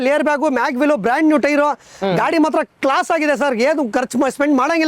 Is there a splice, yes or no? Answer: no